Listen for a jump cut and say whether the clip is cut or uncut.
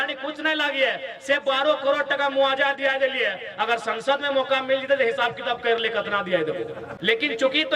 cut